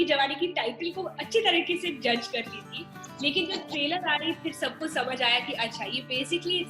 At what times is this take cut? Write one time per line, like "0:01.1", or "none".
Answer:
none